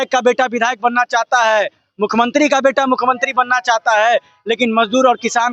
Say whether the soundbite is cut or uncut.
uncut